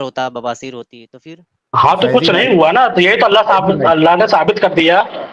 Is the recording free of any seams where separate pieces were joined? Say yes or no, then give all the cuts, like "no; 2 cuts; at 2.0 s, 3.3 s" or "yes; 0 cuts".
yes; 0 cuts